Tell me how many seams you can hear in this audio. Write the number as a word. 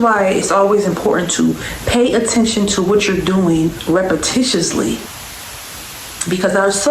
one